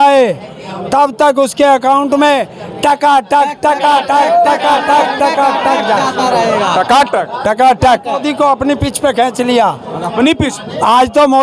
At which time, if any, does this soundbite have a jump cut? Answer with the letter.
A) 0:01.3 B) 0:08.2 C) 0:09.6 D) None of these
B